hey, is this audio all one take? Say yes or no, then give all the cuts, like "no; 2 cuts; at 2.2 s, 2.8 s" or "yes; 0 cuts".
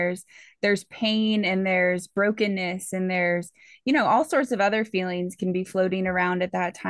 yes; 0 cuts